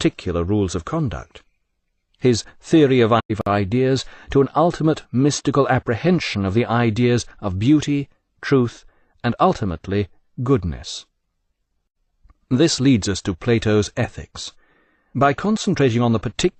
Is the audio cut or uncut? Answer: uncut